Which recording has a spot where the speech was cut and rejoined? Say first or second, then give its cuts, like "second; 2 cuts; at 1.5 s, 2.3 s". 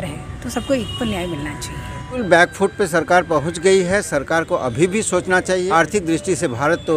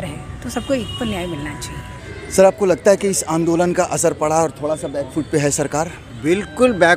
first; 2 cuts; at 2.2 s, 5.6 s